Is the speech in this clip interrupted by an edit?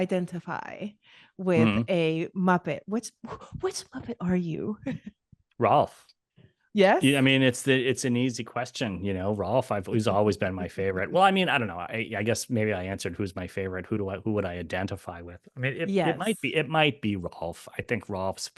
no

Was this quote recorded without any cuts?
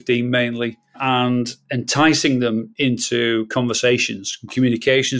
no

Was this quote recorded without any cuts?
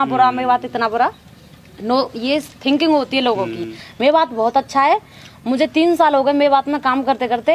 yes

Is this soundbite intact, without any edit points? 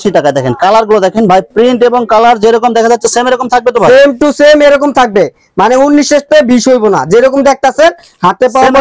yes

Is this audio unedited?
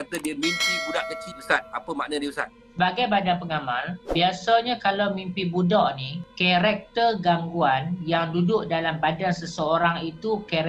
no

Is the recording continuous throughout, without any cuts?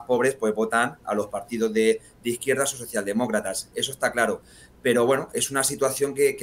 yes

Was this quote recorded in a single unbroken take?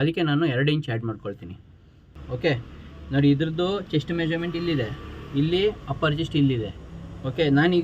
no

